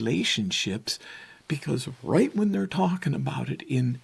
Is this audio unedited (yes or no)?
yes